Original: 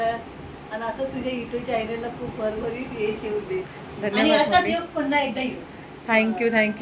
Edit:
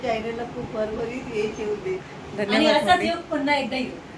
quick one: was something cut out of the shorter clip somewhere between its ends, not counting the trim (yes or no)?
no